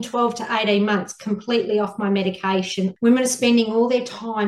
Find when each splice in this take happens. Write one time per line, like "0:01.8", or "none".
0:02.9